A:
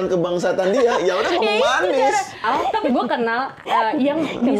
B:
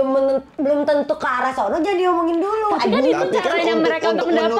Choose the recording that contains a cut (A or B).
A